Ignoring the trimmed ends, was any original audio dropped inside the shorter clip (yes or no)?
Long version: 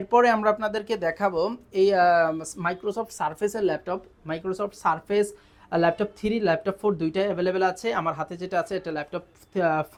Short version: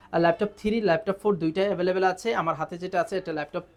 no